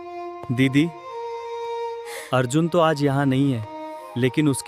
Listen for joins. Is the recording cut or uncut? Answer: uncut